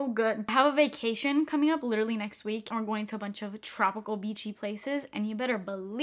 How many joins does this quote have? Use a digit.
0